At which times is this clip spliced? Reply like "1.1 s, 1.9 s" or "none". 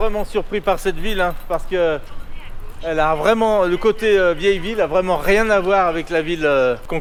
none